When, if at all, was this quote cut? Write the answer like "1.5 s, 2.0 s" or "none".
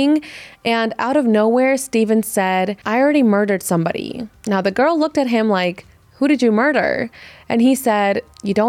none